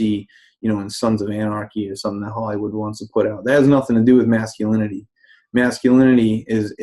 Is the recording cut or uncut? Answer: cut